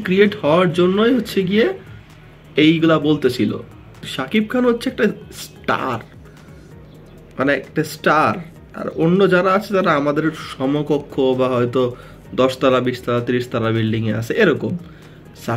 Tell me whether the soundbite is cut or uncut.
cut